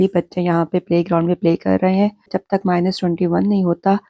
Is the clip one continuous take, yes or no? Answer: no